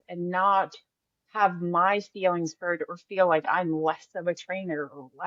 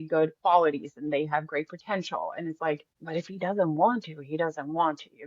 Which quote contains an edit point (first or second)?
second